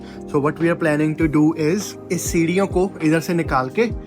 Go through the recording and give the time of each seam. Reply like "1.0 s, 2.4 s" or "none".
1.9 s